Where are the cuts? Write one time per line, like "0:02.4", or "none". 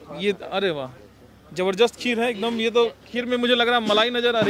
none